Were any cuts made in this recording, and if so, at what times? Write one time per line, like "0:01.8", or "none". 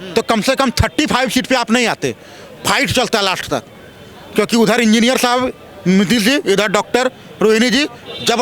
none